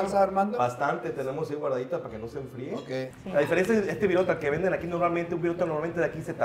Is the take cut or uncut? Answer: cut